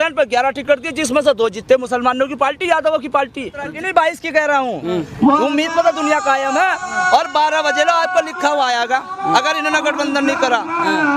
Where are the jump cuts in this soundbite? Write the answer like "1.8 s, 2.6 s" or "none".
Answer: 3.7 s